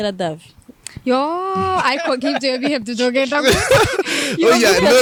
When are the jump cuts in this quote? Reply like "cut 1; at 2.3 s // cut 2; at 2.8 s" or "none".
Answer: none